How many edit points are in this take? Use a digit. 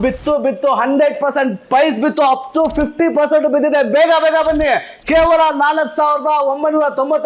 0